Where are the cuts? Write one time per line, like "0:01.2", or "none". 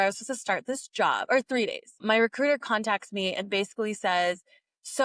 none